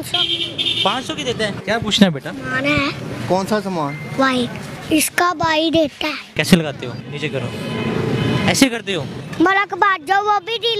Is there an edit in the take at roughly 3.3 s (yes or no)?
no